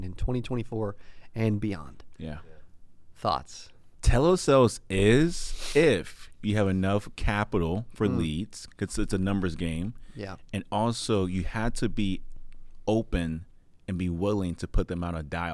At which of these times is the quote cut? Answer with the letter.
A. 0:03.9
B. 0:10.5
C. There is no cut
A